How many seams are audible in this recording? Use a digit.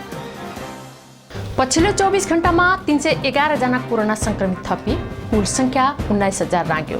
1